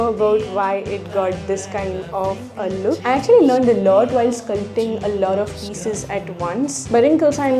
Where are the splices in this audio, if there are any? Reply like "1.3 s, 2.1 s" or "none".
3.1 s, 6.9 s